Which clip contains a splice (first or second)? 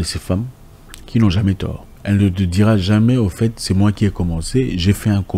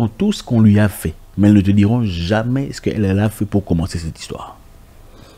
first